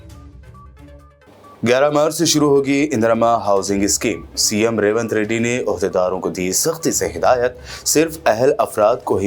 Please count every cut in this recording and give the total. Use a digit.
1